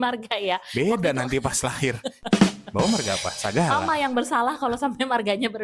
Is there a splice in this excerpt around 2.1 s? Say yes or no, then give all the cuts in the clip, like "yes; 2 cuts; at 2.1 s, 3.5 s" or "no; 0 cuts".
no; 0 cuts